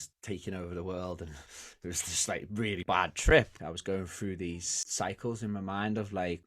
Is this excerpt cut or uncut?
cut